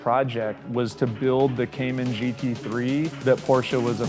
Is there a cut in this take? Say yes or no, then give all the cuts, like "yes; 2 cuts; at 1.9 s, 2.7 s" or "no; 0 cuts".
yes; 1 cut; at 3.1 s